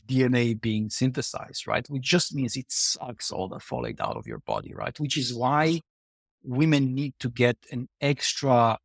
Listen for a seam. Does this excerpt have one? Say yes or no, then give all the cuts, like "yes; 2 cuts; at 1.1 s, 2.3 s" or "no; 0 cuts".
no; 0 cuts